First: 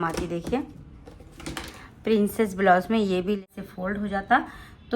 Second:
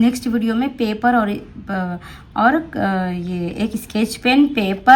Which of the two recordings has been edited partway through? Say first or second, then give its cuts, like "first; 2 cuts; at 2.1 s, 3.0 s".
first; 1 cut; at 3.4 s